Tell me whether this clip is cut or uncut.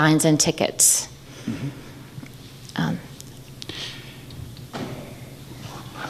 uncut